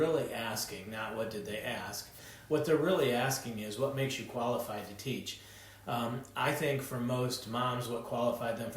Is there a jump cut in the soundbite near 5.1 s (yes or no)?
no